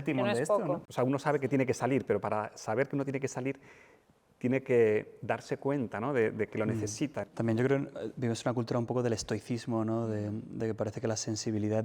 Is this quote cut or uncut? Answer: cut